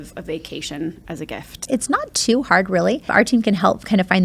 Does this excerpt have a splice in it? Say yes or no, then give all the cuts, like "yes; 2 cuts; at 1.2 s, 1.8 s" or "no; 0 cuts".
yes; 2 cuts; at 1.5 s, 3.1 s